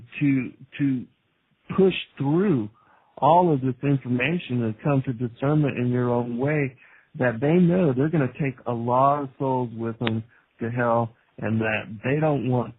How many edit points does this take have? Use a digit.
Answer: 1